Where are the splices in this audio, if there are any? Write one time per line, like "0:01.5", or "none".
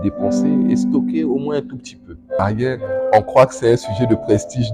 0:02.4